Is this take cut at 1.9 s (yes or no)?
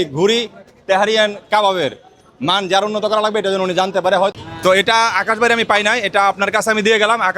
no